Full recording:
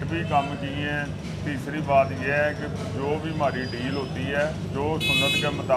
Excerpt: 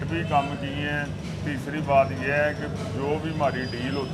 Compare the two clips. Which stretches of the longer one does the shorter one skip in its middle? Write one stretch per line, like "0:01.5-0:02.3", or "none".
none